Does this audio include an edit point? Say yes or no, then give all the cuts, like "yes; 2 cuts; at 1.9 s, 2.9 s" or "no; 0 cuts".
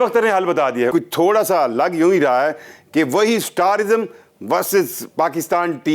yes; 1 cut; at 0.9 s